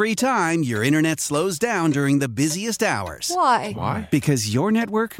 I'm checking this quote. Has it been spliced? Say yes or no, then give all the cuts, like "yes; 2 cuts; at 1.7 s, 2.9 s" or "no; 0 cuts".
no; 0 cuts